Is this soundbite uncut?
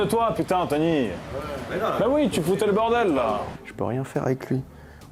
no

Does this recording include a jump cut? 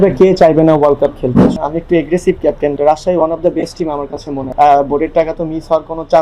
yes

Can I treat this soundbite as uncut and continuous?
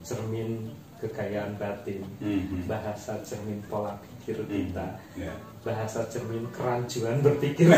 yes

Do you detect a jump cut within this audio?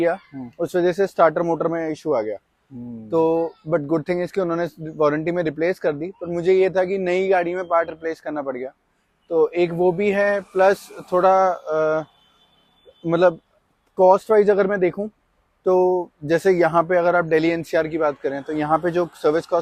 no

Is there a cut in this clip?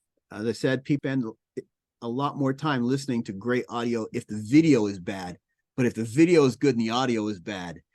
yes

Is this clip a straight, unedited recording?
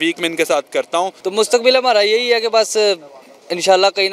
no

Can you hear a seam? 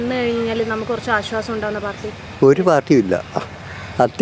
no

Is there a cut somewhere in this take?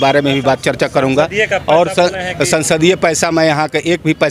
no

